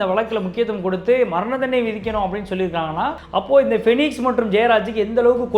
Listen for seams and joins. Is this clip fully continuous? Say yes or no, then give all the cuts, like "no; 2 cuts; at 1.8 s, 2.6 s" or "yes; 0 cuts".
no; 1 cut; at 3.2 s